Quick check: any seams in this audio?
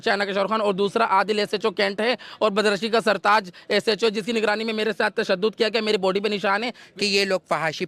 yes; 1 cut; at 6.8 s

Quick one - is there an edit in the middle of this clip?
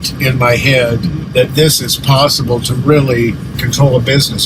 yes; 2 cuts; at 1.2 s, 3.5 s

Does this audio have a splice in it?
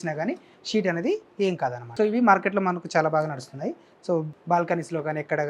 yes; 2 cuts; at 1.8 s, 4.3 s

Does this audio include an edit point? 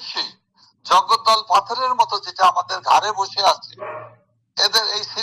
no; 0 cuts

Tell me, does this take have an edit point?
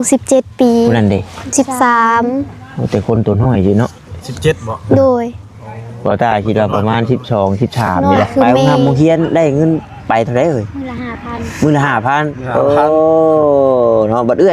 yes; 1 cut; at 8.7 s

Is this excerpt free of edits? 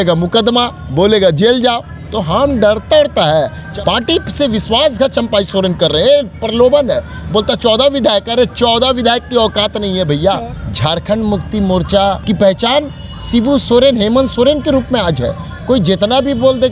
no; 3 cuts; at 3.6 s, 10.5 s, 12.2 s

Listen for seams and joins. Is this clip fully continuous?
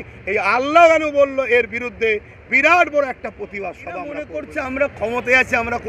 no; 1 cut; at 4.4 s

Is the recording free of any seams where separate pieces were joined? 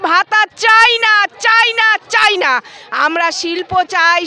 yes; 0 cuts

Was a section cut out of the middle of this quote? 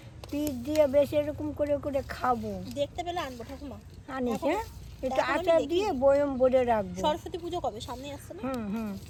no; 0 cuts

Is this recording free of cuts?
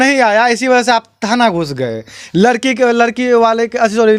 yes; 0 cuts

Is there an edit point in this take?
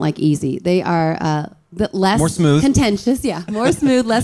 no; 0 cuts

